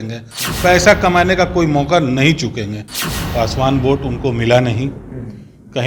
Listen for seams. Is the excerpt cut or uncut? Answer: cut